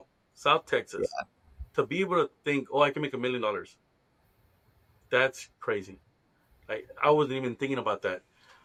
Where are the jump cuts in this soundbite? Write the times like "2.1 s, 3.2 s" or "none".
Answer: none